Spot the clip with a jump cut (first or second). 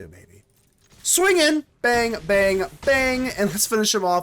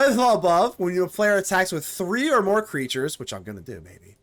first